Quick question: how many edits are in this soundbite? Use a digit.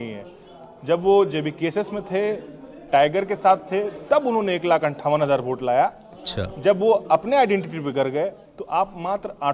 1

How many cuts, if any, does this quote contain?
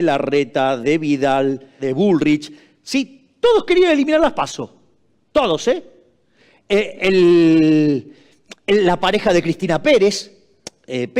1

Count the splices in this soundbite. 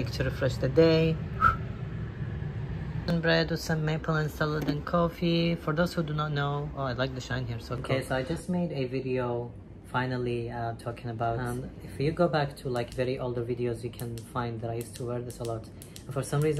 2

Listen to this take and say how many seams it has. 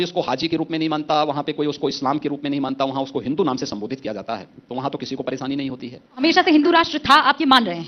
1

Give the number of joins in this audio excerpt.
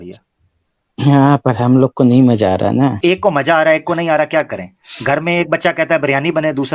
1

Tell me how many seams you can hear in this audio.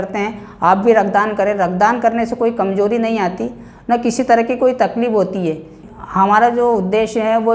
1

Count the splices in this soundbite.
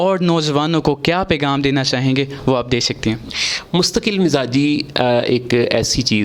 0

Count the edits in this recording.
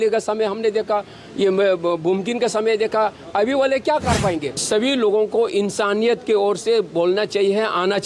1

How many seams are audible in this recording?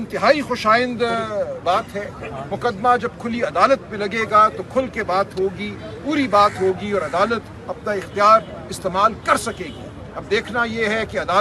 0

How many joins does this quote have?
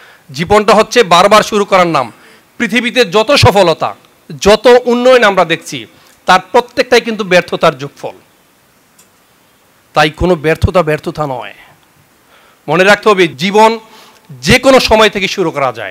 1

